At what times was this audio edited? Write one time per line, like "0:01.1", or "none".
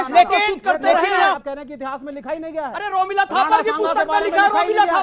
0:01.4